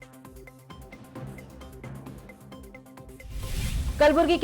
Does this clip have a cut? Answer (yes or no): yes